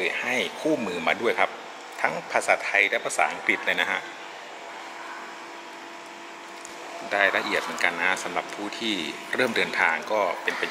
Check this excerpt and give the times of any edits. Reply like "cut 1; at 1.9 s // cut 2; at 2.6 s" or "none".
cut 1; at 4.7 s // cut 2; at 6.7 s